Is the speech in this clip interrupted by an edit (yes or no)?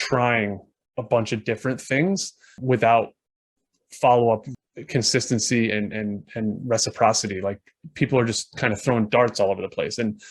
yes